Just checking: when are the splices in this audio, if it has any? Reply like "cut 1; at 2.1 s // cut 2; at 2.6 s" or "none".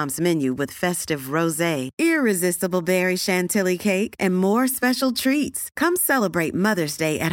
none